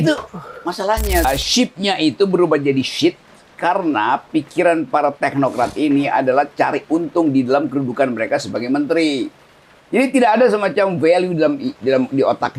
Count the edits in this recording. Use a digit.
1